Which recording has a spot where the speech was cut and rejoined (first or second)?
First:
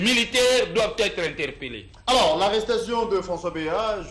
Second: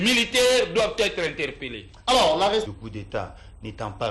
second